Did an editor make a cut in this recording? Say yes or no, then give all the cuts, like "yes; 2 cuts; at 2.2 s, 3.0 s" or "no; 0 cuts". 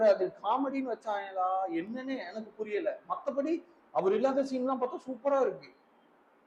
no; 0 cuts